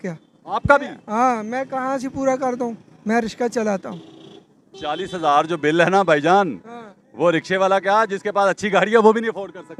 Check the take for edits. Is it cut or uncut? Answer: uncut